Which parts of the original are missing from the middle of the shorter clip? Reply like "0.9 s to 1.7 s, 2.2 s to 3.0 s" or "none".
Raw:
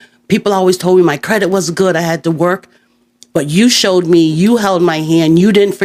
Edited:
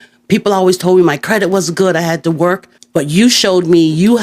2.7 s to 3.1 s

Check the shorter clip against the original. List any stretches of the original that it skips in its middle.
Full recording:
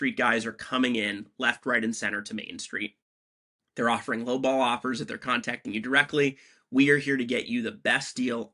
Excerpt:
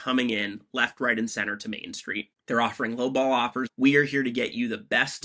3.0 s to 3.6 s, 4.9 s to 6.6 s

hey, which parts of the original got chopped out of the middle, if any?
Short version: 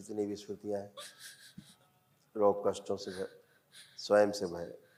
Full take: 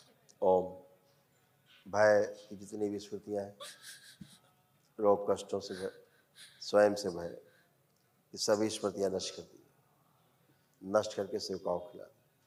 none

